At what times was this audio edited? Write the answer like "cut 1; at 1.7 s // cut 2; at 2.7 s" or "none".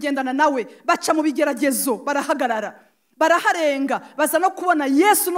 none